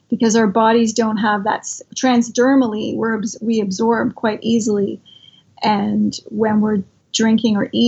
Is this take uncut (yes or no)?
no